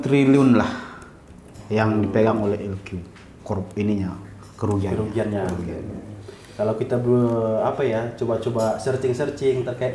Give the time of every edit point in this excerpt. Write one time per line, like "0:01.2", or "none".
none